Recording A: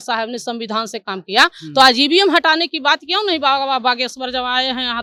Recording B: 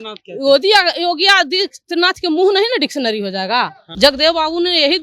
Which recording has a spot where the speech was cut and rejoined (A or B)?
B